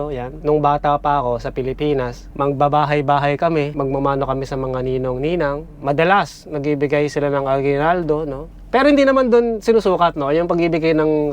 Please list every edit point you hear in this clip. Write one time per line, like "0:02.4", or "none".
0:02.3
0:08.4